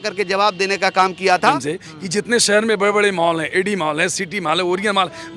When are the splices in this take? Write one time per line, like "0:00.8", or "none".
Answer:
0:01.5